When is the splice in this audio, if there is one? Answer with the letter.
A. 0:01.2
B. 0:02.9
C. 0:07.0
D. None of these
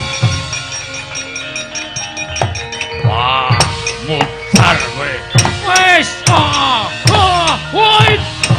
D